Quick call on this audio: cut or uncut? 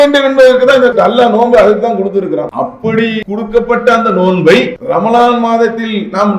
cut